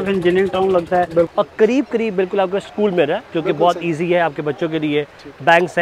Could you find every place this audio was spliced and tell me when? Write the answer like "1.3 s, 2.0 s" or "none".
1.3 s